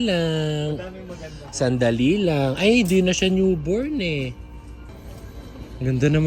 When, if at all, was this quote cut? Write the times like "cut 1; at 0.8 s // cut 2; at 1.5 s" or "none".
cut 1; at 4.9 s

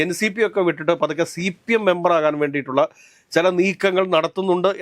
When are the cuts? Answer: none

